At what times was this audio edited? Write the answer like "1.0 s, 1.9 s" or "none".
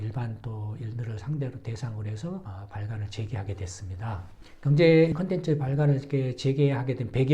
4.3 s, 5.1 s